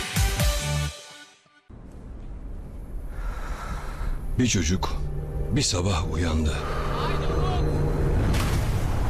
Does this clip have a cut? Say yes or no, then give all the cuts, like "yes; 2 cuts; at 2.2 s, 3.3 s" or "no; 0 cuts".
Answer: yes; 1 cut; at 1.0 s